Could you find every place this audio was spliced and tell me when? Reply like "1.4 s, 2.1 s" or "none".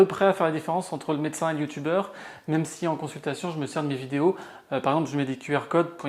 none